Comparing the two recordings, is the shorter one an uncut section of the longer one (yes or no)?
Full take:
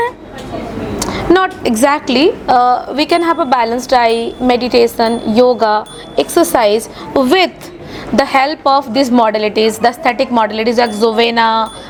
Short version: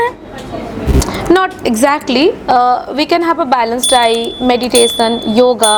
yes